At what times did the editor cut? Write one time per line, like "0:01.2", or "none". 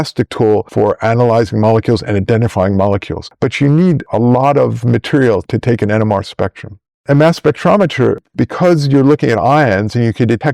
0:07.0
0:08.2